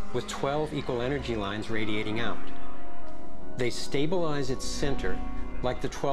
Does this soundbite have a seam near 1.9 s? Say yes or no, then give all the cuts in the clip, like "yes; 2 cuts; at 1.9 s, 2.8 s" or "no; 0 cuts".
yes; 1 cut; at 1.9 s